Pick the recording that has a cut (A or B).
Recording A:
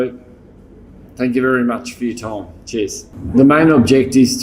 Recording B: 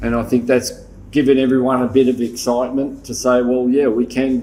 A